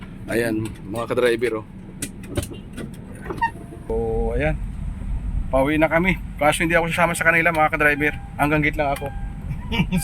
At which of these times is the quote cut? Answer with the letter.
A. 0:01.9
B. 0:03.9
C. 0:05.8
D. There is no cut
B